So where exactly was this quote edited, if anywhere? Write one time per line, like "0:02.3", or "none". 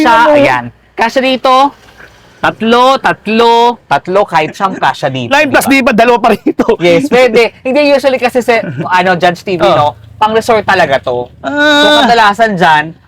none